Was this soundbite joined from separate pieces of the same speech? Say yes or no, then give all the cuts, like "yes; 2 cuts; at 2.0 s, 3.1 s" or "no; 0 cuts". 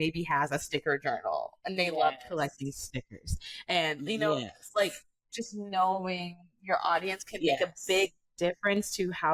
no; 0 cuts